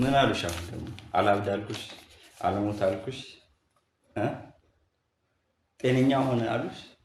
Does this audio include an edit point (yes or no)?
no